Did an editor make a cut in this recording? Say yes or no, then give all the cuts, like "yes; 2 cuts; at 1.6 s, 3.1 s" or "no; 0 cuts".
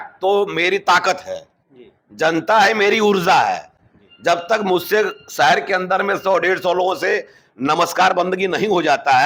no; 0 cuts